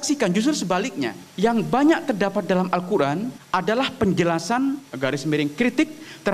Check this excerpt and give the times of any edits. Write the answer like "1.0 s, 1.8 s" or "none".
1.2 s, 3.4 s, 4.9 s